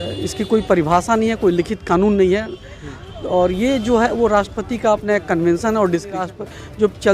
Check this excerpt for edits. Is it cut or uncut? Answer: cut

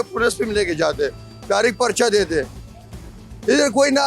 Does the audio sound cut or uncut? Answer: uncut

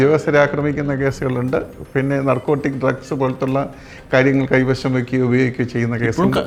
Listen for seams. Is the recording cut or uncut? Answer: uncut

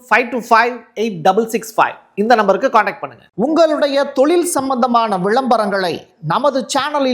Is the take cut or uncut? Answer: cut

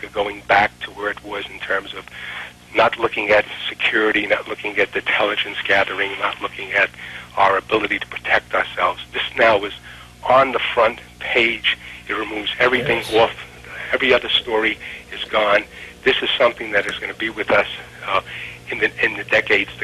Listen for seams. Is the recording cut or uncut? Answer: uncut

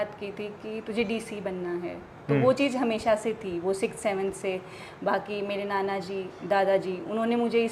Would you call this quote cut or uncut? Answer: uncut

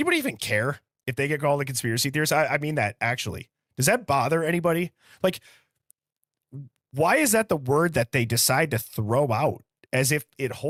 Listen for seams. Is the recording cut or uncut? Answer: uncut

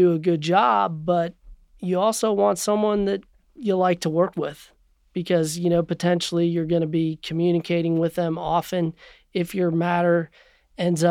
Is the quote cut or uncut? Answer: uncut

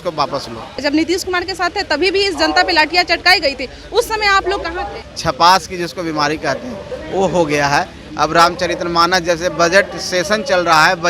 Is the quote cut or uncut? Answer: cut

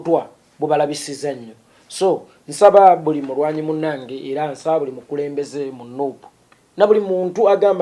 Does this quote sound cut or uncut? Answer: uncut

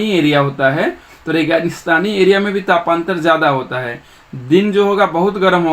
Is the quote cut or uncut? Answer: uncut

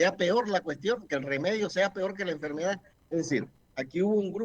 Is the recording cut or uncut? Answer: cut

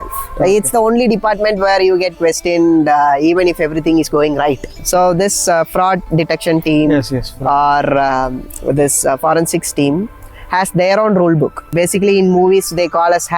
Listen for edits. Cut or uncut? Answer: cut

